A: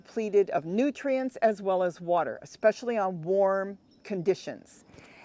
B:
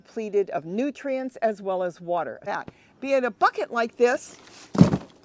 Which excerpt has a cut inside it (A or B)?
B